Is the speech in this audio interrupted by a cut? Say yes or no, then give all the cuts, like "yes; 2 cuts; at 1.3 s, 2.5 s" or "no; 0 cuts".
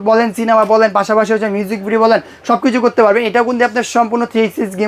no; 0 cuts